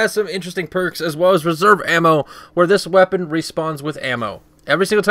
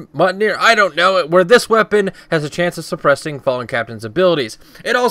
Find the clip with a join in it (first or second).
second